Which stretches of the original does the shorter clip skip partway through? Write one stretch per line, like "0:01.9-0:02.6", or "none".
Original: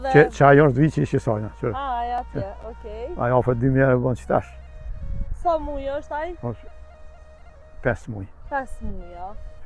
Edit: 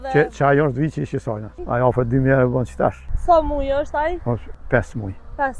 0:01.5-0:03.0
0:04.6-0:05.3
0:06.7-0:07.7